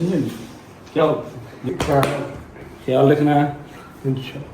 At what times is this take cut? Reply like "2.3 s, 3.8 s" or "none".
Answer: 1.7 s